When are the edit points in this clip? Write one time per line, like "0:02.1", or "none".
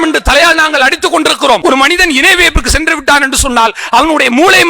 0:01.6